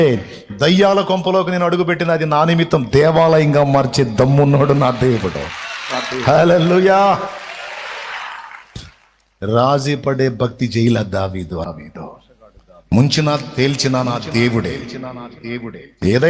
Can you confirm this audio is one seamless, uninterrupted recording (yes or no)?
no